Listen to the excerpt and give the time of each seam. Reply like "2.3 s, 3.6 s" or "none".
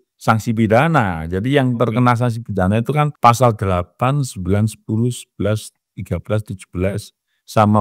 3.1 s